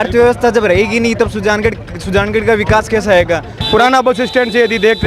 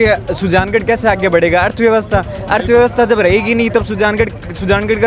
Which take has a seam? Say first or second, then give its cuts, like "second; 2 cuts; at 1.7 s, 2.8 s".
first; 1 cut; at 3.5 s